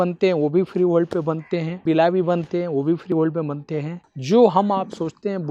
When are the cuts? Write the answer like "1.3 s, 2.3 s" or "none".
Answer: 3.9 s